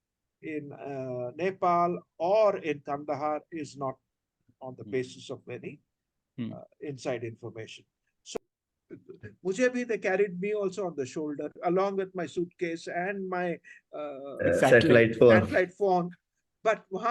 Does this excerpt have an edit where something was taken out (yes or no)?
yes